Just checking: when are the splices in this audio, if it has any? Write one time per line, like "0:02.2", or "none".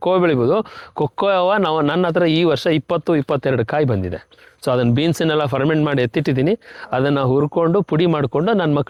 none